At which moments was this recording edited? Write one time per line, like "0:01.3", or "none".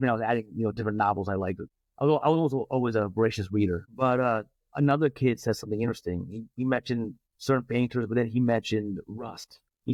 none